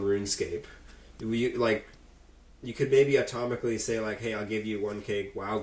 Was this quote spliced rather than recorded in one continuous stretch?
no; 0 cuts

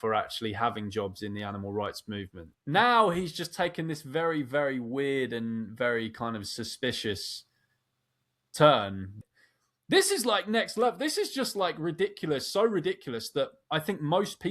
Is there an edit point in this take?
yes; 2 cuts; at 2.4 s, 9.0 s

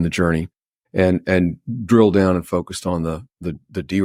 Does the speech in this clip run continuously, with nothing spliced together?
yes; 0 cuts

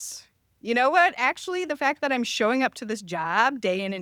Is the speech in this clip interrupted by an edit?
no; 0 cuts

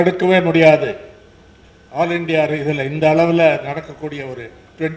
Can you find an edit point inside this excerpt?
no; 0 cuts

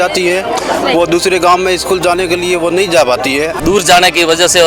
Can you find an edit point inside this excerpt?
yes; 1 cut; at 3.5 s

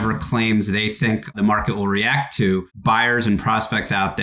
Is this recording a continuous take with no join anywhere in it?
no; 2 cuts; at 1.3 s, 2.7 s

